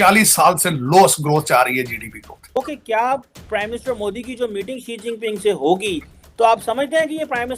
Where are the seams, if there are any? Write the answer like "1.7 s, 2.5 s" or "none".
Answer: 2.3 s, 6.2 s